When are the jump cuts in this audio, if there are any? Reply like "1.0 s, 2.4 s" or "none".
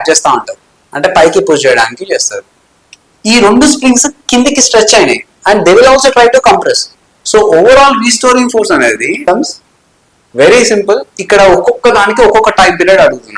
9.2 s